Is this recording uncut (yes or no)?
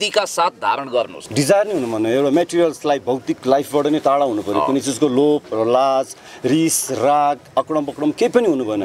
no